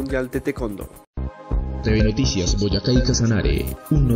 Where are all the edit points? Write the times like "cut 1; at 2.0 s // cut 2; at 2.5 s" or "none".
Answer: cut 1; at 1.0 s